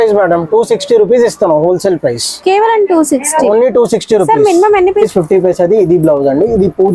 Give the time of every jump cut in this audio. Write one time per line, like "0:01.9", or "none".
0:05.0